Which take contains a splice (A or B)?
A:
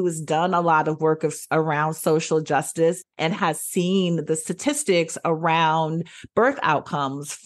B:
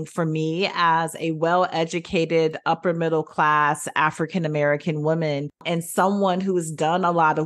B